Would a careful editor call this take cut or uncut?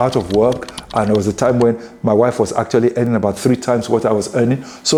uncut